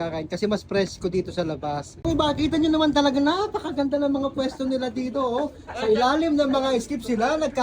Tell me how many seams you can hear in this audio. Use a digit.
1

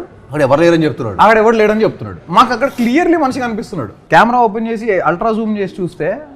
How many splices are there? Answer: 1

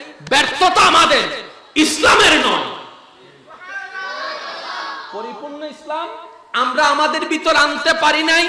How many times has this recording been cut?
0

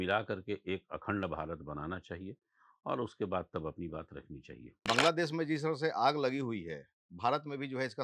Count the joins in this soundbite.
1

